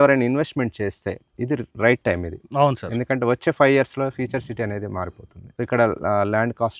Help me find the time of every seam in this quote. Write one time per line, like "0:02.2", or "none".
none